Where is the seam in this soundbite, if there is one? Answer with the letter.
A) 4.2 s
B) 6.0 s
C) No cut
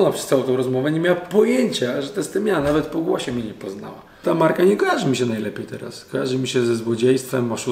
A